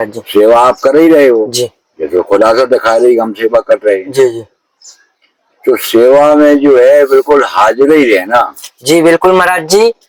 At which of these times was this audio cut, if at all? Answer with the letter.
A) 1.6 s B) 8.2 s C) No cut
C